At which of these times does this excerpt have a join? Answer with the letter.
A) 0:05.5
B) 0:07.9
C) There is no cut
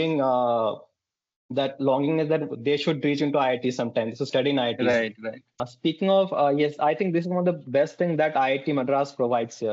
A